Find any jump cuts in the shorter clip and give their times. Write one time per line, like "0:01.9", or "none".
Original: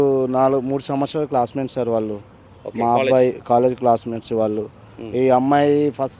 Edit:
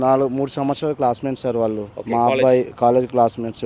0:01.9